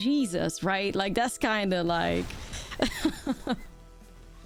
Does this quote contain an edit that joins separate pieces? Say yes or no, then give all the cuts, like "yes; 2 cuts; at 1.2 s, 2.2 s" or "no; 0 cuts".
no; 0 cuts